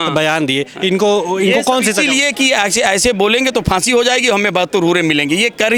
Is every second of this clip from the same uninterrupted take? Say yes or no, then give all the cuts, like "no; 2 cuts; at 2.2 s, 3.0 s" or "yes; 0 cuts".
yes; 0 cuts